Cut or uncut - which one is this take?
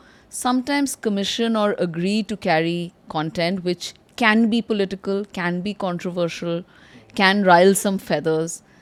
uncut